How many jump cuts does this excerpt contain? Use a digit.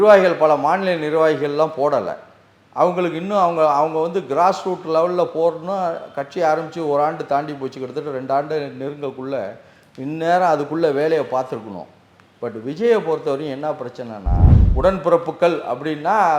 1